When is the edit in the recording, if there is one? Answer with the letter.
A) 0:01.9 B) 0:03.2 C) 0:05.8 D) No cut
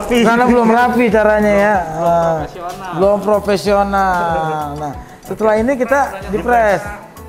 D